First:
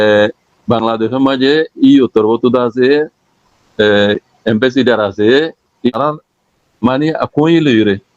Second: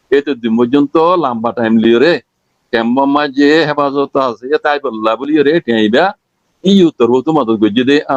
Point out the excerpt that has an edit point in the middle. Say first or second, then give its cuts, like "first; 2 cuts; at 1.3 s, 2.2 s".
first; 1 cut; at 5.9 s